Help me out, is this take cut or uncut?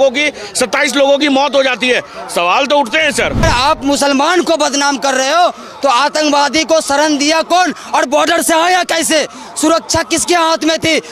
cut